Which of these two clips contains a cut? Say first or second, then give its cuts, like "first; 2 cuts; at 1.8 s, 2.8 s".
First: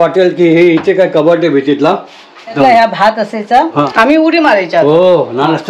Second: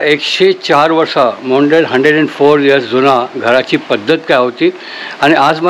first; 2 cuts; at 2.6 s, 3.9 s